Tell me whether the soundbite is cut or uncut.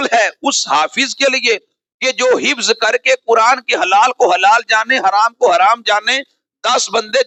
uncut